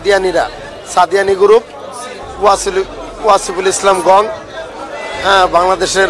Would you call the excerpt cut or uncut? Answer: uncut